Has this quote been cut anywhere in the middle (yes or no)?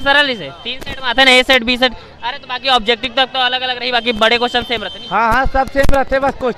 no